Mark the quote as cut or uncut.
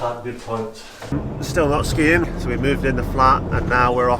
cut